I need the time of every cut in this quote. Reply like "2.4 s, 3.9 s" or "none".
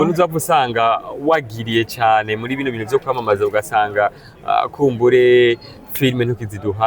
none